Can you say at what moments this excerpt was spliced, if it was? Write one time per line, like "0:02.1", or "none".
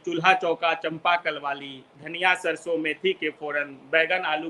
none